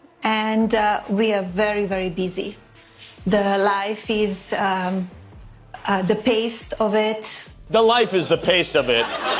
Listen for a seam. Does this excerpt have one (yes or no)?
no